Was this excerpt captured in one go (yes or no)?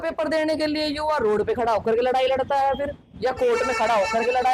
yes